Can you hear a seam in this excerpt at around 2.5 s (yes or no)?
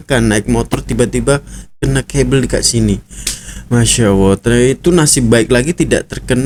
no